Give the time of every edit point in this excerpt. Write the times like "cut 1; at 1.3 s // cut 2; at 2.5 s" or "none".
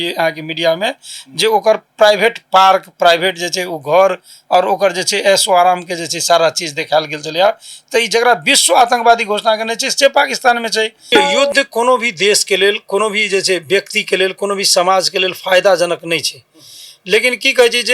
cut 1; at 11.1 s